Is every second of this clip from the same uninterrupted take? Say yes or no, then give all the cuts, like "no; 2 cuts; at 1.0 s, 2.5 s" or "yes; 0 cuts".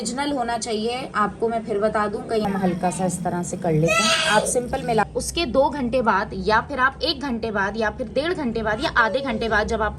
no; 2 cuts; at 2.4 s, 5.0 s